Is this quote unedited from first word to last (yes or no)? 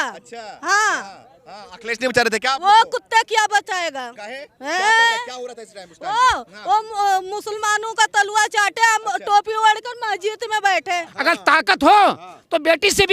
no